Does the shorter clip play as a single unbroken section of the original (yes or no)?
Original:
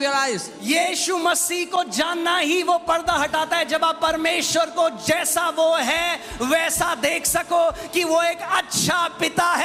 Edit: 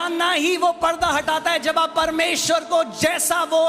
yes